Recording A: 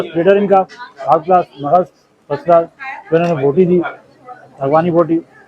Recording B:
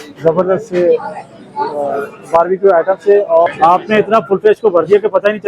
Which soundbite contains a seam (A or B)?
B